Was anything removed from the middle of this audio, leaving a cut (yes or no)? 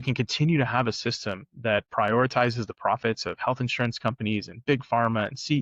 no